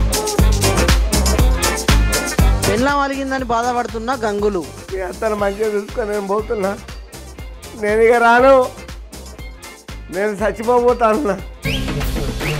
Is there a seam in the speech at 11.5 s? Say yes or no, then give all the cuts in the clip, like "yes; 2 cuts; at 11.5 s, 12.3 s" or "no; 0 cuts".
yes; 1 cut; at 11.5 s